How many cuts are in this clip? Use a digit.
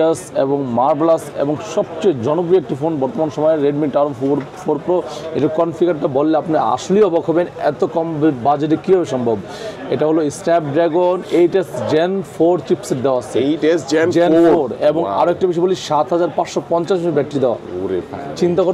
0